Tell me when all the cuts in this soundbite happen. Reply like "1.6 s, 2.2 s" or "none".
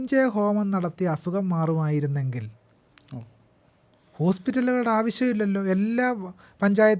none